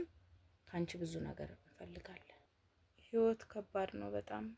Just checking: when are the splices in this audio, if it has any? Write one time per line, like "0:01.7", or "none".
0:02.4